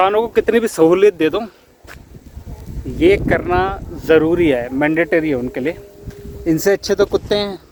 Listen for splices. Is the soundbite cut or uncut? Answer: uncut